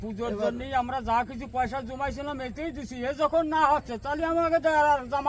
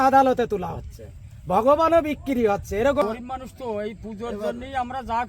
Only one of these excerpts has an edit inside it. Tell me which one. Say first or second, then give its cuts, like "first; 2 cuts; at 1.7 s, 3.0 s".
second; 1 cut; at 3.0 s